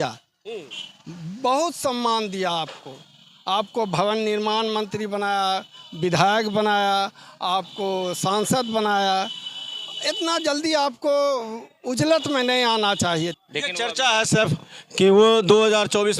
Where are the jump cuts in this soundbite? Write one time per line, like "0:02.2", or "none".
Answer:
0:13.4